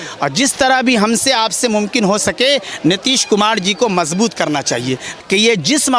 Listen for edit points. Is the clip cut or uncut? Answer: cut